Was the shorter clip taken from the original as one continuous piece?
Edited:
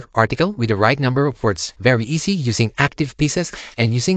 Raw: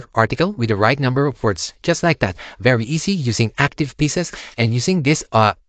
no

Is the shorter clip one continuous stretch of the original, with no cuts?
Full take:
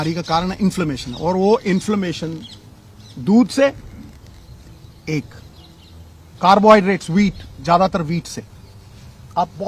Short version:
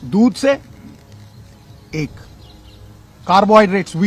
yes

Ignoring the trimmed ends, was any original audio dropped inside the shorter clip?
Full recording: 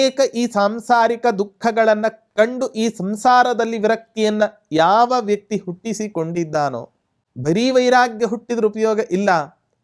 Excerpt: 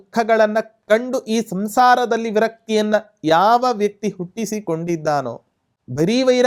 no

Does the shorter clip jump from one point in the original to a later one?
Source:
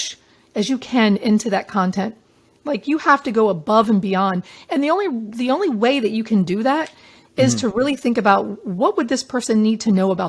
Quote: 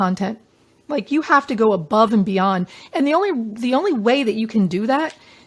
no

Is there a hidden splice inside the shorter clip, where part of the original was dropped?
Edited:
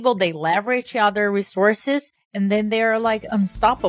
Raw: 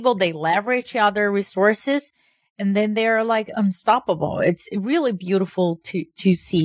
yes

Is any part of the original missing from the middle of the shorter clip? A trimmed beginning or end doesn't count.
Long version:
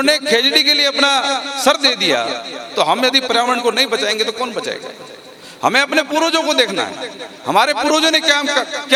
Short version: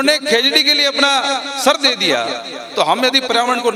no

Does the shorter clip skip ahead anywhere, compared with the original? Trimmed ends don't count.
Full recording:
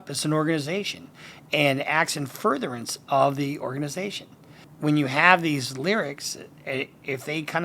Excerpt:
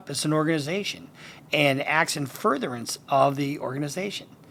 no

